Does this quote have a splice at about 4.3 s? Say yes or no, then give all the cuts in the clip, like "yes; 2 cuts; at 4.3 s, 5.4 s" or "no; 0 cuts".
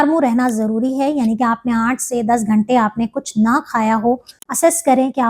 yes; 1 cut; at 4.3 s